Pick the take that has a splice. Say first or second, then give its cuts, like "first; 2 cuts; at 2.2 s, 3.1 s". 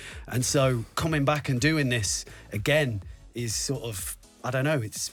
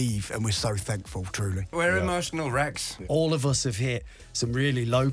second; 2 cuts; at 1.7 s, 3.0 s